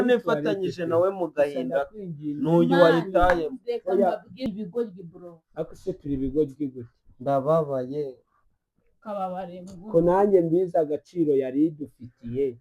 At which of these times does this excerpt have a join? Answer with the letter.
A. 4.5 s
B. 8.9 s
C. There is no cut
A